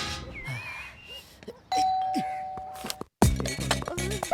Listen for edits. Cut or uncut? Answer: uncut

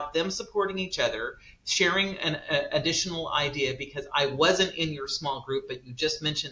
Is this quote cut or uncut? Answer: uncut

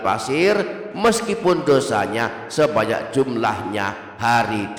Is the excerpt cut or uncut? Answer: uncut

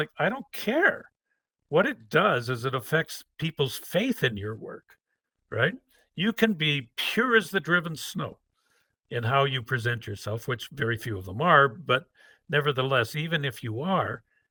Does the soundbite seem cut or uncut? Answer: uncut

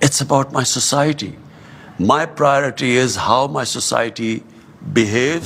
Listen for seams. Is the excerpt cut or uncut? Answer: uncut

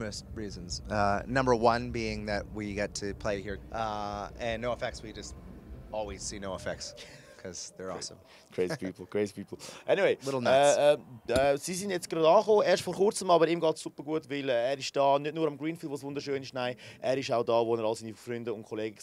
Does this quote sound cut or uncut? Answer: uncut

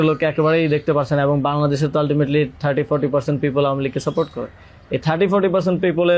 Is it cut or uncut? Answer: uncut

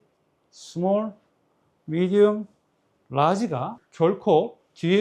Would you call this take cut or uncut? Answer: cut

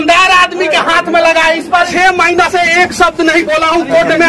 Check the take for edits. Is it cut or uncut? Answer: cut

